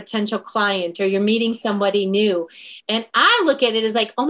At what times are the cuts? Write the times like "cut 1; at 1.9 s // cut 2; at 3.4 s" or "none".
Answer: cut 1; at 2.7 s